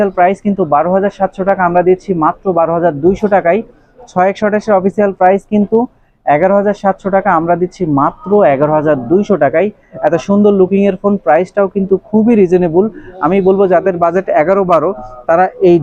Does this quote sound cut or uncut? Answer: uncut